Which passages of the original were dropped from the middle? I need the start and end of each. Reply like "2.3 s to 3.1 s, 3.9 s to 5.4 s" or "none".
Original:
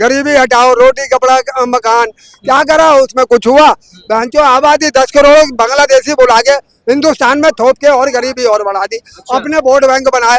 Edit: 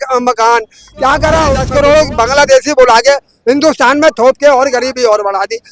3.1 s to 5.1 s